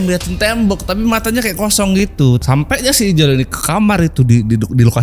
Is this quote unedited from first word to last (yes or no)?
no